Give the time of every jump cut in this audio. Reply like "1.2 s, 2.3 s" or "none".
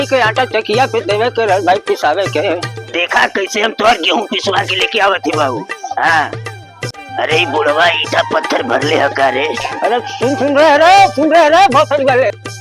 2.8 s, 7.0 s, 9.7 s